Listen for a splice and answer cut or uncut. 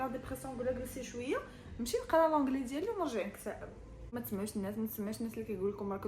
cut